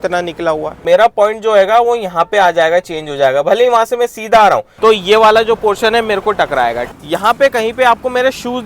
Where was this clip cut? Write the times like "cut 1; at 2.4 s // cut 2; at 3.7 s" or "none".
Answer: cut 1; at 0.8 s // cut 2; at 4.7 s // cut 3; at 6.9 s